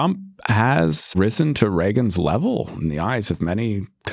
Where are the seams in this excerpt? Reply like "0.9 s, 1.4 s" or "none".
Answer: 1.1 s